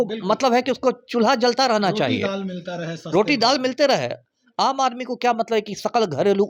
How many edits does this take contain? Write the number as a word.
zero